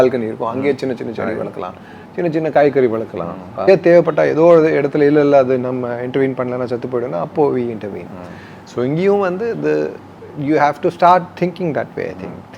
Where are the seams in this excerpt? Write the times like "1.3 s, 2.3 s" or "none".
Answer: 3.7 s